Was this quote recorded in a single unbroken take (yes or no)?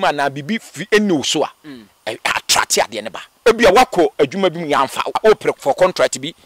no